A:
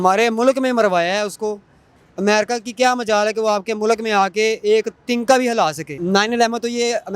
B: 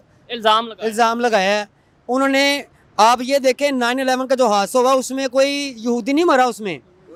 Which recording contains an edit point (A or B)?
A